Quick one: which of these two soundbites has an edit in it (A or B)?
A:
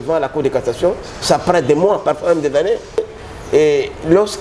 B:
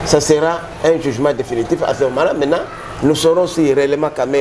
A